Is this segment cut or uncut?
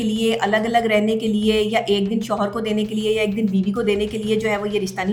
uncut